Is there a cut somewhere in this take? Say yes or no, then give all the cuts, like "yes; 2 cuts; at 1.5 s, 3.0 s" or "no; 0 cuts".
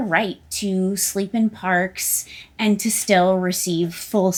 no; 0 cuts